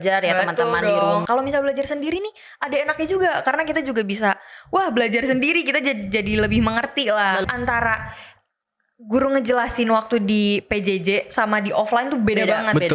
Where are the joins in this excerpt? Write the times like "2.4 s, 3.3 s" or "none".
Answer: 1.2 s, 7.4 s